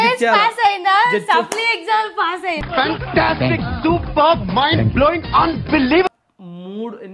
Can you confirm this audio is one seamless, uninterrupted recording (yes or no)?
no